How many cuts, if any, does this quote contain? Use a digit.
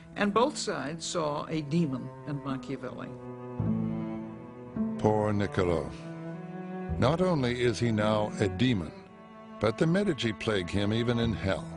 1